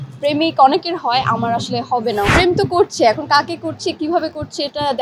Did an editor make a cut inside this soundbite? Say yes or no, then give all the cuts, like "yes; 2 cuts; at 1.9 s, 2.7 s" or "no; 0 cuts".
yes; 1 cut; at 2.3 s